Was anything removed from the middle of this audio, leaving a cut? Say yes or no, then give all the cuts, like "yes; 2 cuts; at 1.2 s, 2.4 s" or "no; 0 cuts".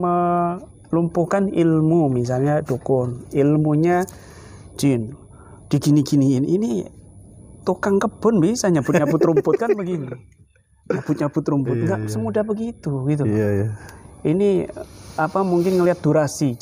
no; 0 cuts